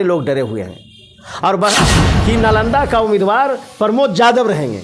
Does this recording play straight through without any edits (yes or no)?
no